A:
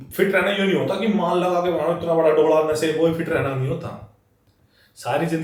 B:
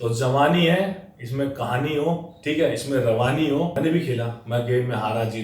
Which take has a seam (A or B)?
B